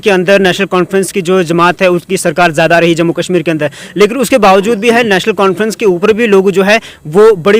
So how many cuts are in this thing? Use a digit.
0